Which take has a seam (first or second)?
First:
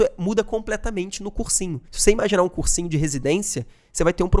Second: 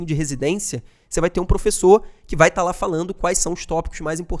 first